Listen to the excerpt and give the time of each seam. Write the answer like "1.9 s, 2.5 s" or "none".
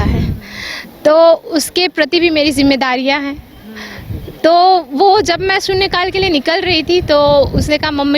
none